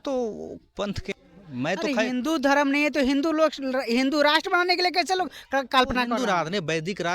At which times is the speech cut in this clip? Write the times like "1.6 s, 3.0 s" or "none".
1.1 s